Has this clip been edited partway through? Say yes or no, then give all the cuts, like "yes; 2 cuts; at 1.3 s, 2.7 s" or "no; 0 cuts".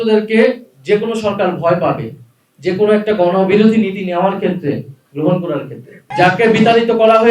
yes; 1 cut; at 6.1 s